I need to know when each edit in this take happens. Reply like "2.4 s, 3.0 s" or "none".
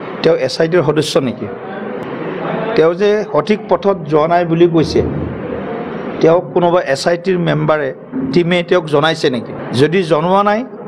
2.0 s, 9.6 s